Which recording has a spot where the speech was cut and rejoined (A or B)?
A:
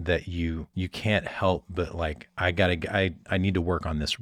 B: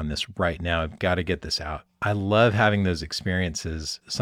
B